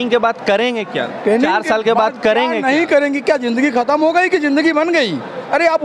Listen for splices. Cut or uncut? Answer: uncut